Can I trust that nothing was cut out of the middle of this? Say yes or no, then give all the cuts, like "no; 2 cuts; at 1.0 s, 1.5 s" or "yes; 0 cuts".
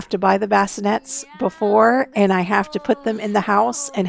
yes; 0 cuts